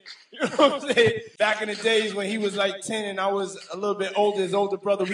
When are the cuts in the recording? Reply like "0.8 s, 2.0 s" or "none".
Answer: 1.3 s